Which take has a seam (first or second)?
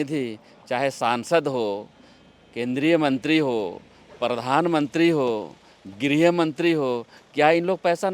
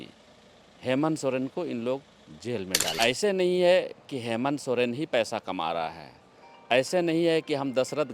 second